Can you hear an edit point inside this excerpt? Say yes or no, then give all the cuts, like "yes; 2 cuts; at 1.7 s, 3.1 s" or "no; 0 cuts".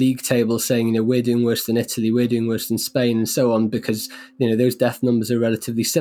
no; 0 cuts